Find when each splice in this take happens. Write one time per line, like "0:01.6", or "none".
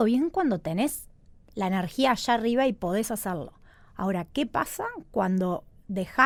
none